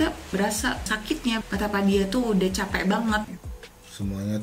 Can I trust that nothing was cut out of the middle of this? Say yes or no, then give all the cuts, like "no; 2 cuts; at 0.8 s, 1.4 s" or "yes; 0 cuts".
no; 1 cut; at 3.3 s